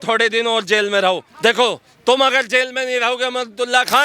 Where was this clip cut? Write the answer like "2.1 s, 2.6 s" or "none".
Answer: 1.3 s